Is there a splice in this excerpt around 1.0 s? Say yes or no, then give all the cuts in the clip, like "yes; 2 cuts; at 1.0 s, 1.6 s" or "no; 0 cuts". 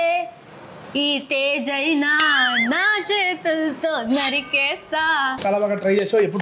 no; 1 cut; at 5.4 s